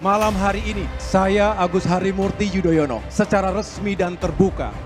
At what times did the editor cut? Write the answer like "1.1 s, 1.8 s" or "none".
1.0 s, 3.1 s